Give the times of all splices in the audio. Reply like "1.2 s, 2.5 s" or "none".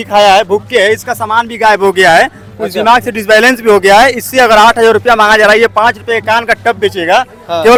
none